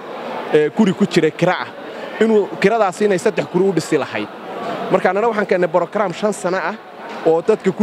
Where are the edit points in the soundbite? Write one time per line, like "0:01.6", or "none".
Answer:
none